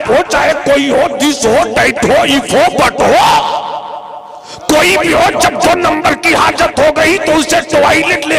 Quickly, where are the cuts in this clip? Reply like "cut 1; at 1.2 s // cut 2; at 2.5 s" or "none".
none